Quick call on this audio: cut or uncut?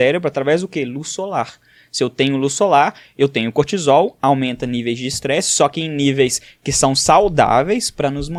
uncut